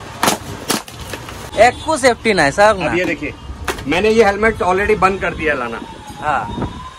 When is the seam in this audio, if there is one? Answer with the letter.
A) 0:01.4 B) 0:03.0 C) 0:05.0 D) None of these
A